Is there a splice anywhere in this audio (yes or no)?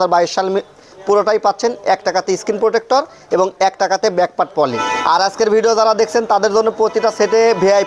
yes